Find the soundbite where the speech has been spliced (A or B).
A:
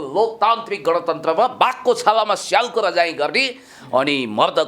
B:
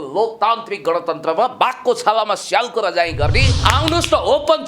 B